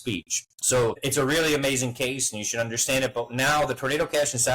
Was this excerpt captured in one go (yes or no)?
no